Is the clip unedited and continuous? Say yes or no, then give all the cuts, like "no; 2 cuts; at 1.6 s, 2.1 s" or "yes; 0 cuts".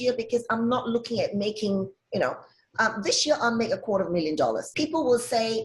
no; 1 cut; at 4.7 s